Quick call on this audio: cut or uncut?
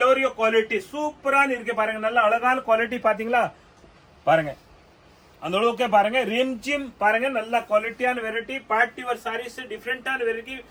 uncut